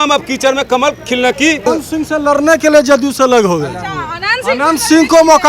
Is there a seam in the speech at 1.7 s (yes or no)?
yes